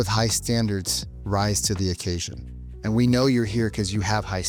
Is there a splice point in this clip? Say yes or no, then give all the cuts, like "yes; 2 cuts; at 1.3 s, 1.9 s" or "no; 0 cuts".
no; 0 cuts